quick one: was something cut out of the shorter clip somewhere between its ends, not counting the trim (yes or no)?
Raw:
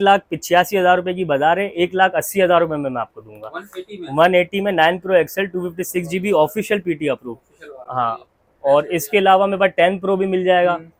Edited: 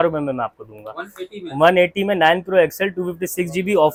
no